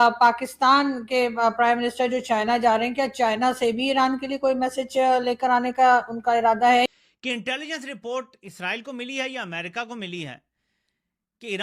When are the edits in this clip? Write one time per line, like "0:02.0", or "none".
0:06.9